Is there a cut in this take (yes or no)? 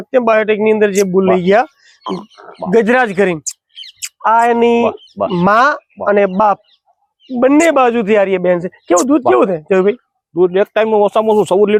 no